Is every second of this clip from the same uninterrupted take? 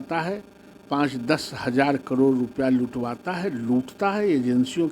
yes; 0 cuts

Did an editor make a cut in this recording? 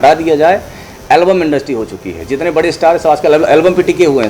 no; 0 cuts

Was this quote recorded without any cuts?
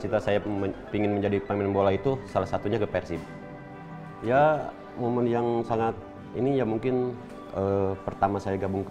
yes; 0 cuts

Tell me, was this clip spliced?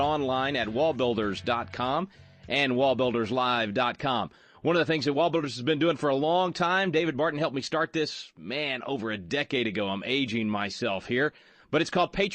yes; 1 cut; at 4.5 s

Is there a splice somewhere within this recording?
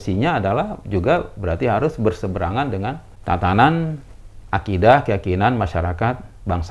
yes; 1 cut; at 3.1 s

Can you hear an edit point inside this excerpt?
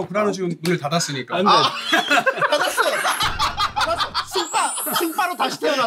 no; 0 cuts

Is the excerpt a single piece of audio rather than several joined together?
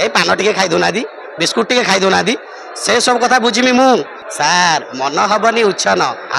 no; 1 cut; at 4.2 s

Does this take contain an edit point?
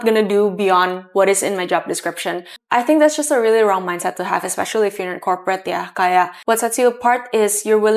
yes; 2 cuts; at 2.5 s, 6.4 s

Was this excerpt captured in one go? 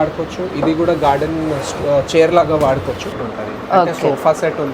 no; 1 cut; at 3.3 s

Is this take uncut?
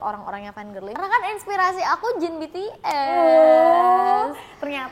no; 1 cut; at 1.0 s

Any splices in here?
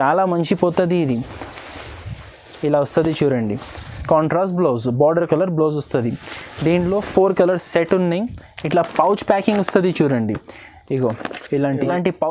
no; 0 cuts

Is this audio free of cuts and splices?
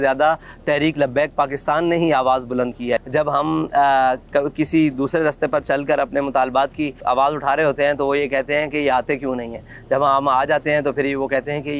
no; 1 cut; at 3.0 s

